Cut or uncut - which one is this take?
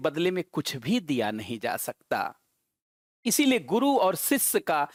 uncut